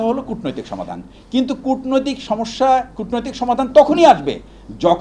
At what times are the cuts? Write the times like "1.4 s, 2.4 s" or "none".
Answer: none